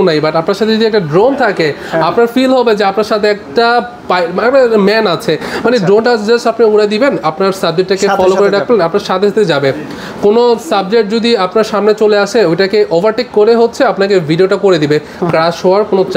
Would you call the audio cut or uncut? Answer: uncut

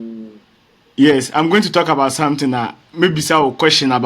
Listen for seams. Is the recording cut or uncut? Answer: cut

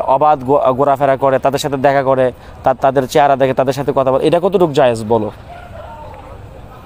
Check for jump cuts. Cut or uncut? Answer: uncut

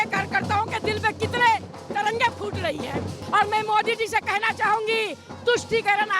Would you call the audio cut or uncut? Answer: cut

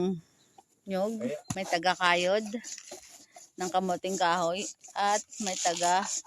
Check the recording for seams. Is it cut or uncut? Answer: cut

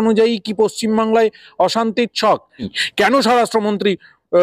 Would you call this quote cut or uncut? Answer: cut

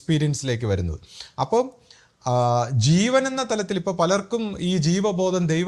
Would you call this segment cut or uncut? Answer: uncut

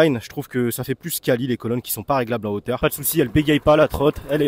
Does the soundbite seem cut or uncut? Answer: cut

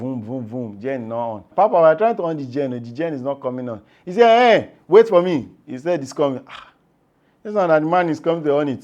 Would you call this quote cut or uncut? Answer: cut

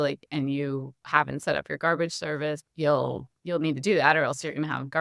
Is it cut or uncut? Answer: cut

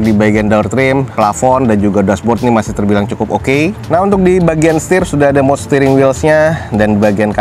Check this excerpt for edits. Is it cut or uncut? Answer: uncut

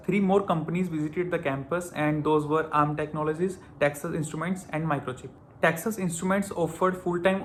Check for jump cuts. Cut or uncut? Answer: uncut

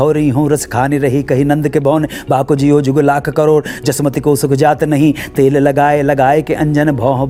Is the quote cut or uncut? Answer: uncut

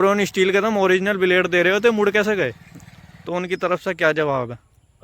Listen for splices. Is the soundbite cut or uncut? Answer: cut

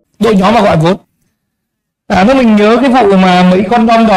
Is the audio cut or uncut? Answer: cut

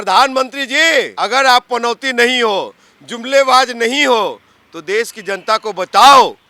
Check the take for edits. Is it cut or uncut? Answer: cut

